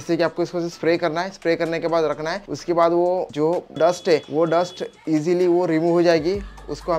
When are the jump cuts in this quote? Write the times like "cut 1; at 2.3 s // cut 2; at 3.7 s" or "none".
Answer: none